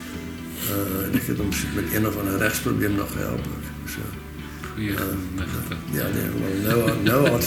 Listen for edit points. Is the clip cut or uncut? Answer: uncut